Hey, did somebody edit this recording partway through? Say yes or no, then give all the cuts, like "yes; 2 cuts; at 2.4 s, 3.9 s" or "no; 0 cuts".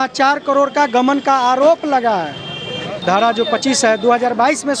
yes; 1 cut; at 3.0 s